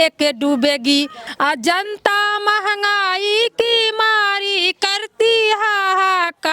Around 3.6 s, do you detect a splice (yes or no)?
no